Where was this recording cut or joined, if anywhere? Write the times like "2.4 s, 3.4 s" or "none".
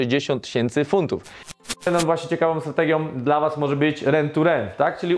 1.5 s